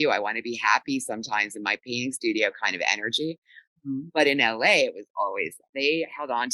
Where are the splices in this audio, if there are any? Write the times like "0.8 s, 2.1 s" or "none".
5.6 s